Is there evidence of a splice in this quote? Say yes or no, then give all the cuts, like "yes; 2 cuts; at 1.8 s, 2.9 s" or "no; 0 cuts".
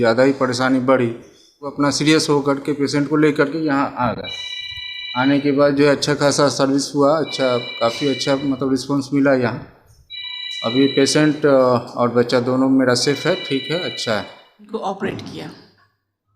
yes; 2 cuts; at 1.7 s, 14.7 s